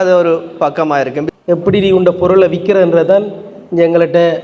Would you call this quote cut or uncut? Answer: cut